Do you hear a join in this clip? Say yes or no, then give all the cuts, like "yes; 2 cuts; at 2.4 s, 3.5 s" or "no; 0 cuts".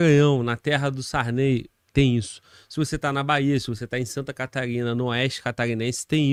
no; 0 cuts